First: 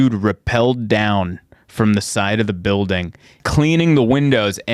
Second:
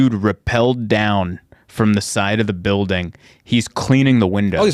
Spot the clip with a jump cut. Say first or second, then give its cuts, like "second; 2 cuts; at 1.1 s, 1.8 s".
first; 1 cut; at 3.4 s